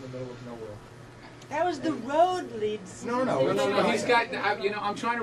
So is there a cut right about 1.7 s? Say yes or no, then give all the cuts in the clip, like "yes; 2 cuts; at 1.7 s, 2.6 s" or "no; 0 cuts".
no; 0 cuts